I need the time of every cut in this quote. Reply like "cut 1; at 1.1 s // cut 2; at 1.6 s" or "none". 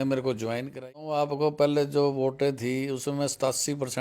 cut 1; at 1.0 s